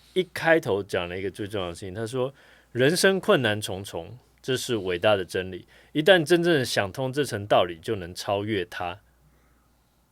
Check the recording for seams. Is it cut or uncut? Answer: uncut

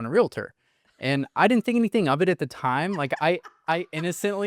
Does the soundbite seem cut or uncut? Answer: uncut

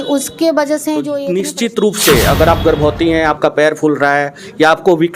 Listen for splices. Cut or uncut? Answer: cut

